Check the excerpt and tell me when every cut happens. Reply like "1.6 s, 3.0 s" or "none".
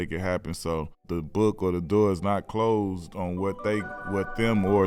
1.0 s